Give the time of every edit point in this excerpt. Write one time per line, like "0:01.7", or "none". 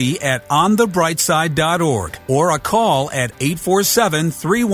0:02.1